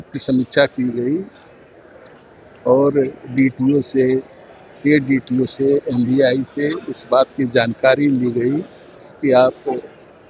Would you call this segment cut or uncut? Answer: uncut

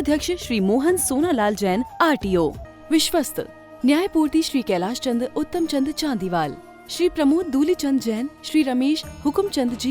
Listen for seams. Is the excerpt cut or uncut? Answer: cut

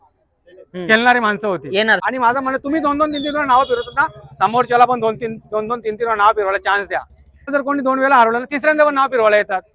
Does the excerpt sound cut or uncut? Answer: cut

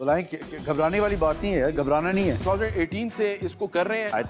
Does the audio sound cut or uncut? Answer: cut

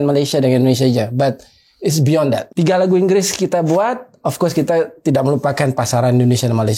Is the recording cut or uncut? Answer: cut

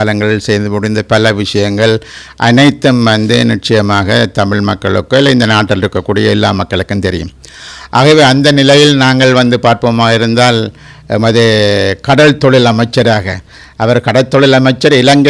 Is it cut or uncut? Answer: uncut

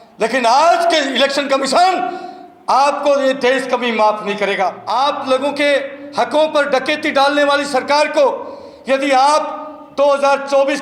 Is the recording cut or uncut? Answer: cut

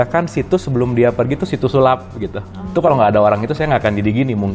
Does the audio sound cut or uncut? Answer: cut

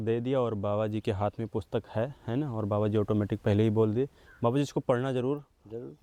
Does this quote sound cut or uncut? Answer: uncut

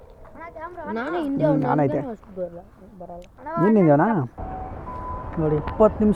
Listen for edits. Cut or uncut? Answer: cut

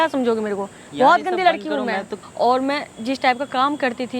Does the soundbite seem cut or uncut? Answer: cut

